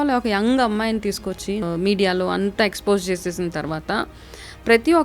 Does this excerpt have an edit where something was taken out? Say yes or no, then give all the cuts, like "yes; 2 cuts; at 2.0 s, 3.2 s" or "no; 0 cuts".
yes; 1 cut; at 1.6 s